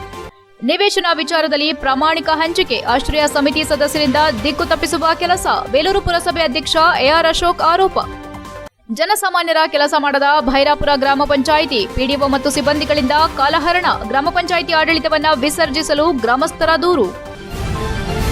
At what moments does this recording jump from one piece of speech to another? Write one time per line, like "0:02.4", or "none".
0:17.3